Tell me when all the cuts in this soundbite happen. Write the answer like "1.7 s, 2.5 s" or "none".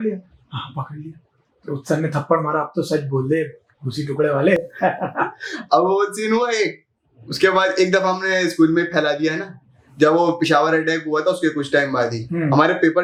none

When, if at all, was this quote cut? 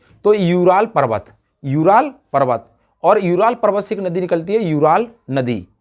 none

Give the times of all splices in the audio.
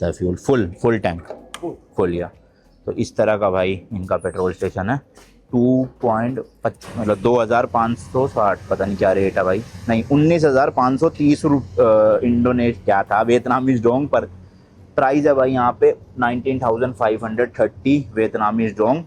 none

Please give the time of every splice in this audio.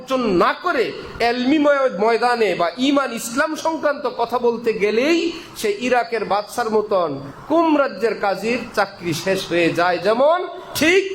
none

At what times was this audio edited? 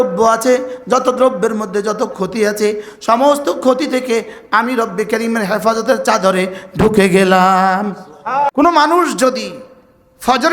8.5 s

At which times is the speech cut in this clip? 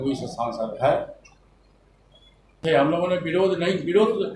2.6 s

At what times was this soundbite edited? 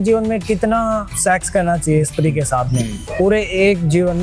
1.1 s, 3.0 s

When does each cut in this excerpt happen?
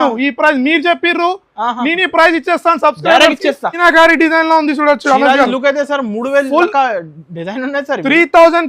3.8 s

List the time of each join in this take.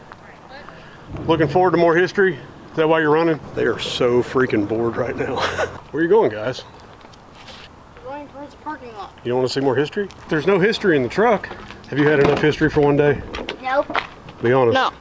1.0 s, 3.5 s, 5.8 s

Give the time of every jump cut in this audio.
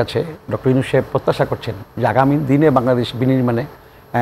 none

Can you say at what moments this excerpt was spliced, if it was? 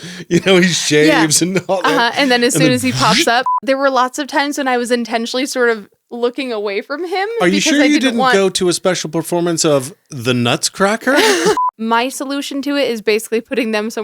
3.5 s, 11.6 s

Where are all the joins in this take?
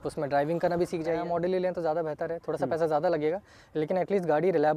1.1 s

